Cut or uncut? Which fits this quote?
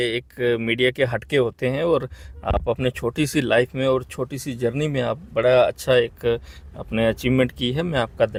uncut